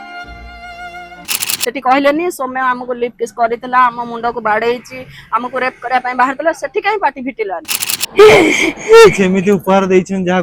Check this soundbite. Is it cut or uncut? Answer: cut